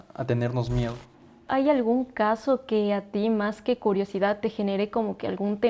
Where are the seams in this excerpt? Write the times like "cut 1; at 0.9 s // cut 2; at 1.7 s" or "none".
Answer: cut 1; at 1.5 s